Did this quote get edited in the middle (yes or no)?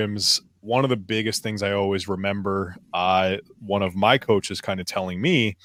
no